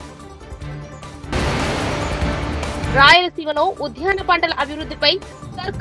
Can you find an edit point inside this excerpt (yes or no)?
yes